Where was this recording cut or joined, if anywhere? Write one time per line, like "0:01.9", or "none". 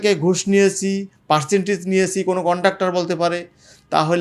none